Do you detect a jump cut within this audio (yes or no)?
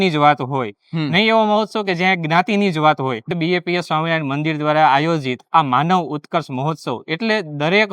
yes